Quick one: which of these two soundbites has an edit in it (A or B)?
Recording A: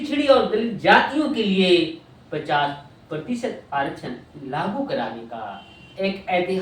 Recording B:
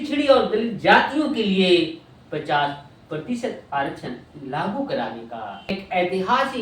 B